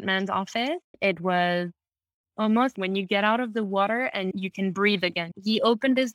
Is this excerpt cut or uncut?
cut